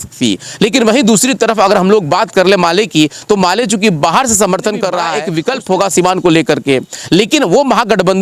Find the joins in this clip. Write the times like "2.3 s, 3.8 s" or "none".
5.2 s

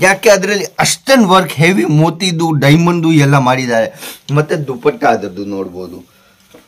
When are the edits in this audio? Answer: none

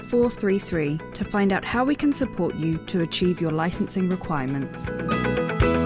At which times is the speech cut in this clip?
4.9 s

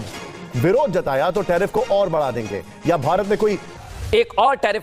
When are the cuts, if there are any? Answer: 3.8 s

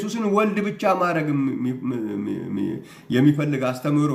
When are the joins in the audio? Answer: none

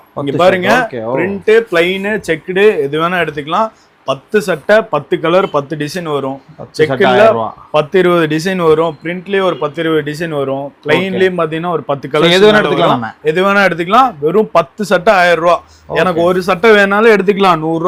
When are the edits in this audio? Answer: none

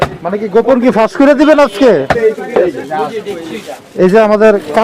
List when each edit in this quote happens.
2.2 s

